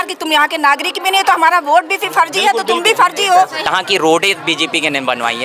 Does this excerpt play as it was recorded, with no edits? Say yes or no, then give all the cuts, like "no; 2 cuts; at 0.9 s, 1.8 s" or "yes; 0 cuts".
no; 1 cut; at 3.6 s